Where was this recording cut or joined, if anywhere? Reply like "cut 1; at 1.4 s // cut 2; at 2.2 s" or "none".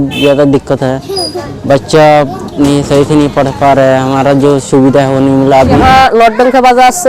cut 1; at 5.8 s